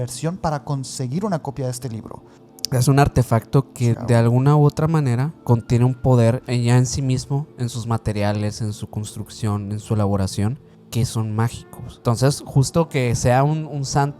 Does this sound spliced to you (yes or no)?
yes